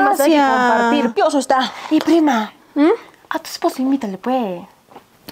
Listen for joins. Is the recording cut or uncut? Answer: cut